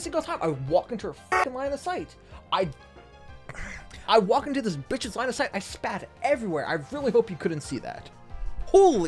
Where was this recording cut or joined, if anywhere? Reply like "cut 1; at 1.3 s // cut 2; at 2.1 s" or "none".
cut 1; at 4.0 s